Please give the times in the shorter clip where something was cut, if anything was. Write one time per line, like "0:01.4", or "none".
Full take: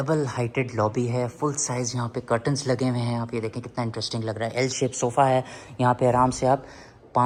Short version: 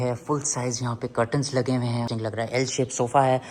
0:02.1